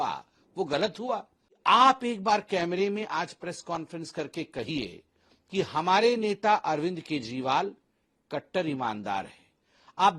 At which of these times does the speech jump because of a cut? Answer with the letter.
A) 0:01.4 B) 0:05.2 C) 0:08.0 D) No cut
A